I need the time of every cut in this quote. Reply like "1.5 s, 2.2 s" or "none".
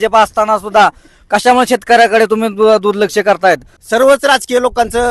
3.7 s